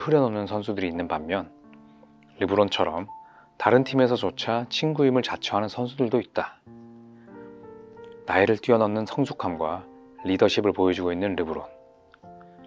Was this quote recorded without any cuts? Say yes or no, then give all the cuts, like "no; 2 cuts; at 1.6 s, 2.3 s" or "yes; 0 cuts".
yes; 0 cuts